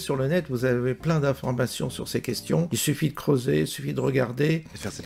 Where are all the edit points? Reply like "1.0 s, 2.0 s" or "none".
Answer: 2.7 s